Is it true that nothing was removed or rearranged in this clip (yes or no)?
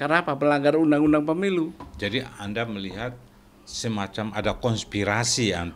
yes